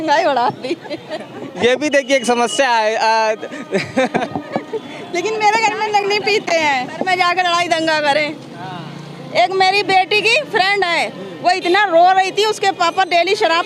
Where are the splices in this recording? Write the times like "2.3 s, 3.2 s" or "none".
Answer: none